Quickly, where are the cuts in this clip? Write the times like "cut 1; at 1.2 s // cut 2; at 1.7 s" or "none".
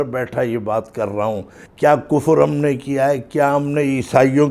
cut 1; at 1.6 s